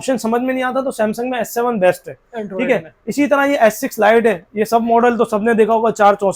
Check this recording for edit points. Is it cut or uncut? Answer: uncut